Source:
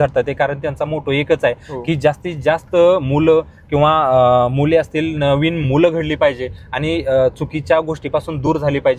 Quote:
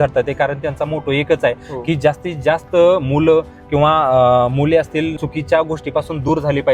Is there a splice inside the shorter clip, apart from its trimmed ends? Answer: yes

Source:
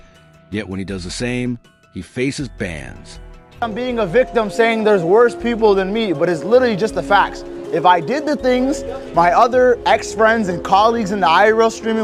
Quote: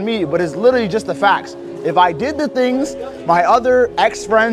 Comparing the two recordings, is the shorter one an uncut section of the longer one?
yes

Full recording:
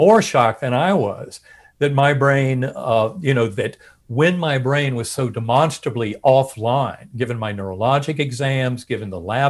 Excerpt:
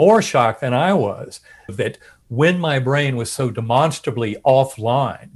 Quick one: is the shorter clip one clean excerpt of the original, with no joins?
no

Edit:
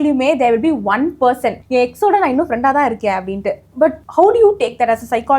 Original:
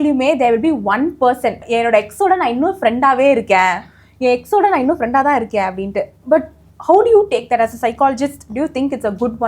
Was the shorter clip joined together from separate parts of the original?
yes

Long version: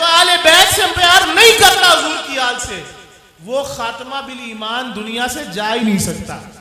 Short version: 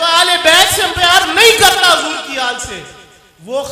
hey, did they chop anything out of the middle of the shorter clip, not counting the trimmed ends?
no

